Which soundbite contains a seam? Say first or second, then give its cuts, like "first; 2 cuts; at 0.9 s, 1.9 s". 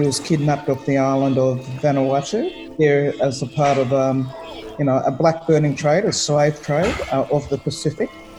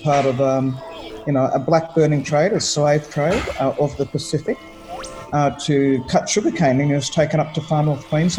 first; 1 cut; at 2.6 s